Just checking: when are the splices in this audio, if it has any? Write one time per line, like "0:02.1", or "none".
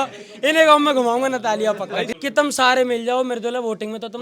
0:02.1